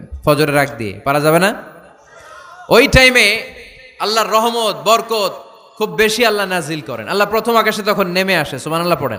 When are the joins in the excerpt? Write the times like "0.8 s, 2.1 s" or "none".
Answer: none

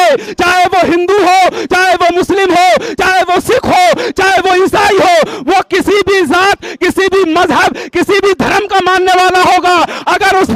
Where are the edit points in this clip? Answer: none

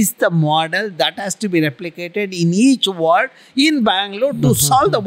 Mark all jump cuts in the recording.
none

